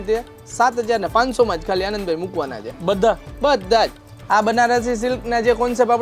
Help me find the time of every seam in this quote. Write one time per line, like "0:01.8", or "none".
0:04.1